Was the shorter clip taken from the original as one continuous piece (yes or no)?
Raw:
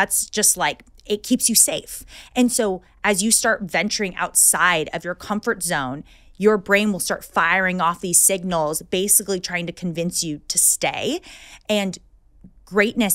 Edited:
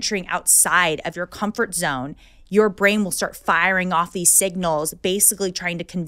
yes